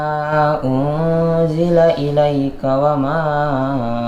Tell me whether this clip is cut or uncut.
uncut